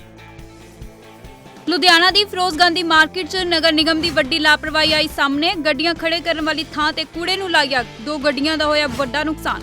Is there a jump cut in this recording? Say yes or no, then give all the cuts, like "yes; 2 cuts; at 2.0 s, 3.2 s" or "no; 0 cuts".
yes; 1 cut; at 1.5 s